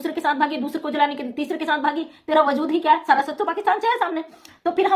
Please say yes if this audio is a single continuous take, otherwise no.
yes